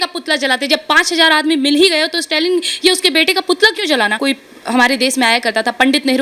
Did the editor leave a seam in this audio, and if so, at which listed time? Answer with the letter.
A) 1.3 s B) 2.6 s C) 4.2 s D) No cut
C